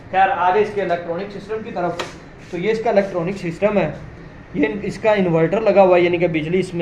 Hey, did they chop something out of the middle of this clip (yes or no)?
no